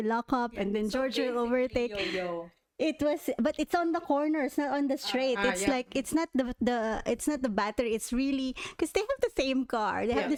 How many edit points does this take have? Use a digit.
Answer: 0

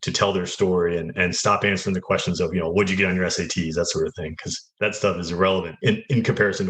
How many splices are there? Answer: 2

